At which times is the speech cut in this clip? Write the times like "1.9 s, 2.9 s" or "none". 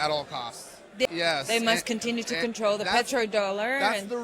1.1 s